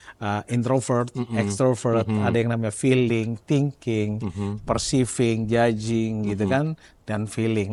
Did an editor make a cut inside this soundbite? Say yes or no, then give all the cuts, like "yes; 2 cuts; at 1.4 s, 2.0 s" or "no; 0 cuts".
no; 0 cuts